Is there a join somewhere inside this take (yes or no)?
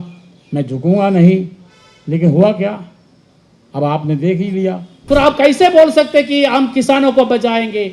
yes